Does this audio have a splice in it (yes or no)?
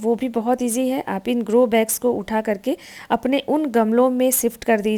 no